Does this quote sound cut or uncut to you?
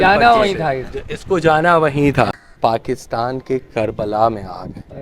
cut